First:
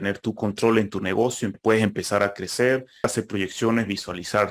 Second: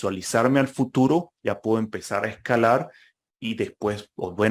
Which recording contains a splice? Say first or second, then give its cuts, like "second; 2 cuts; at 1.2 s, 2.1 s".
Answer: first; 2 cuts; at 1.5 s, 3.1 s